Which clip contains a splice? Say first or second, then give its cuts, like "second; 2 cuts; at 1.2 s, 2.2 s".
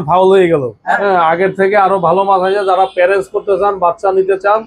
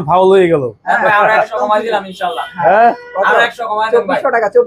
first; 1 cut; at 1.0 s